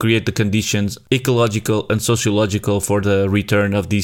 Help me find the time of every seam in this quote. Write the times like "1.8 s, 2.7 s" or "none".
1.0 s